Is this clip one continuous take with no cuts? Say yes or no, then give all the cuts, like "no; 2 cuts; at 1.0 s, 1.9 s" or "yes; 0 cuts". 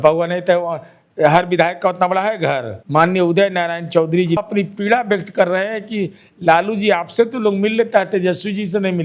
no; 2 cuts; at 2.7 s, 4.4 s